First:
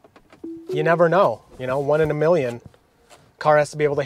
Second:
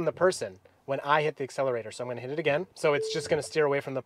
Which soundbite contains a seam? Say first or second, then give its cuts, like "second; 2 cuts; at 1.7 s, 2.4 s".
second; 1 cut; at 2.7 s